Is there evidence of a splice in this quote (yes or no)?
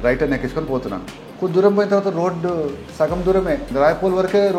yes